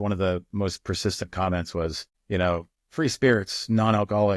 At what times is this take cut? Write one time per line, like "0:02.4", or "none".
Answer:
0:02.1
0:02.8